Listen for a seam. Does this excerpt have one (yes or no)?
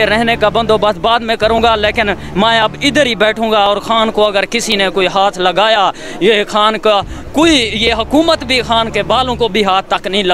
no